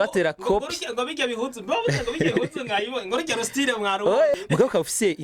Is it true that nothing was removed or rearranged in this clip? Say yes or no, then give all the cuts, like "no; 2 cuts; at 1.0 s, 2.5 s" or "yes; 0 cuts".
no; 1 cut; at 4.3 s